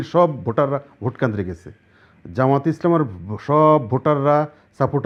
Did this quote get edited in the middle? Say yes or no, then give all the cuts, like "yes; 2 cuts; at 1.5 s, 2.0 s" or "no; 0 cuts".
no; 0 cuts